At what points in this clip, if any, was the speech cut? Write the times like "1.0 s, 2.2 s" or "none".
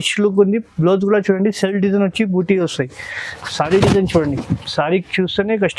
none